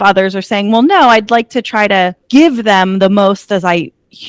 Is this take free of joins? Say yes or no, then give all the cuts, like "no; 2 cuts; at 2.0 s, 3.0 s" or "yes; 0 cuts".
no; 1 cut; at 2.2 s